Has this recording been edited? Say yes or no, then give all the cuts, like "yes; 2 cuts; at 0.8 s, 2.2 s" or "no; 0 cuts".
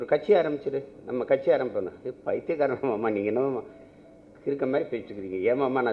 no; 0 cuts